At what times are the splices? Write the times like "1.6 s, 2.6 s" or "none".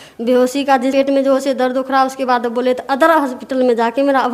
0.9 s